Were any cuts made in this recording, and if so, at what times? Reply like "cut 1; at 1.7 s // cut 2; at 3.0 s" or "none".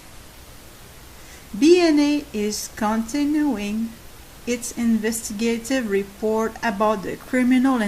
cut 1; at 4.9 s